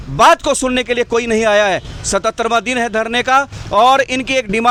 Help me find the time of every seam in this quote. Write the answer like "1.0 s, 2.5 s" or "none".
none